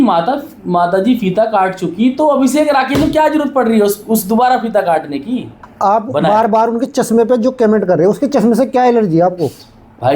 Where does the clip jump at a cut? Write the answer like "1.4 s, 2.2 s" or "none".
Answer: 5.5 s